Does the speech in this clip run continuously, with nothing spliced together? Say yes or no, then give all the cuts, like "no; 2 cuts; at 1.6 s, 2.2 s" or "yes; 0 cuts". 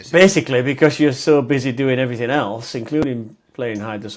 yes; 0 cuts